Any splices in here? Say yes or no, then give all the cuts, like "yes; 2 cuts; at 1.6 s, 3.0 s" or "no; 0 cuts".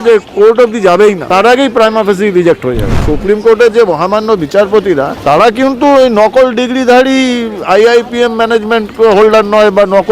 yes; 3 cuts; at 1.2 s, 3.1 s, 5.1 s